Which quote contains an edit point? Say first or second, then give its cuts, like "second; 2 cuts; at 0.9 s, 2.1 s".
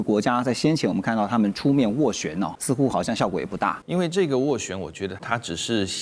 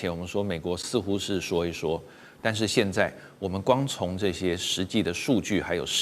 first; 3 cuts; at 2.6 s, 3.8 s, 5.2 s